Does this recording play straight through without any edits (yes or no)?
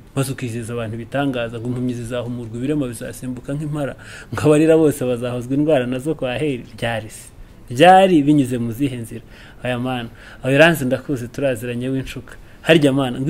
yes